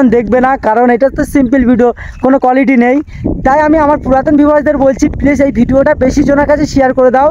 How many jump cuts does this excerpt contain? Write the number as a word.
zero